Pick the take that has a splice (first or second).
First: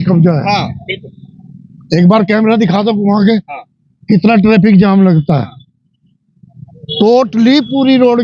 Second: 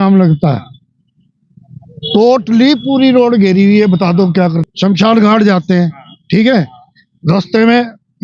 second